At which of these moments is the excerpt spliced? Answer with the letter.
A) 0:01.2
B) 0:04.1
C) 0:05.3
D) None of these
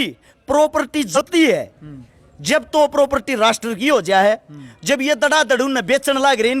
A